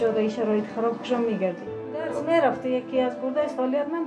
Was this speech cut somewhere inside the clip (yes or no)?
yes